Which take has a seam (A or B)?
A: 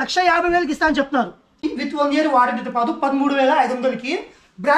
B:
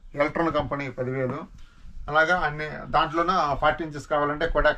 A